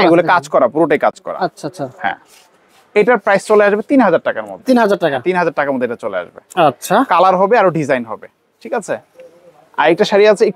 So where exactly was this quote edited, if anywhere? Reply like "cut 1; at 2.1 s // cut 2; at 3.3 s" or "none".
none